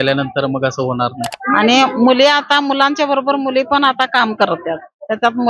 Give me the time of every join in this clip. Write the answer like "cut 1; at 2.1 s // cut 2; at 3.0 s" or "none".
cut 1; at 1.4 s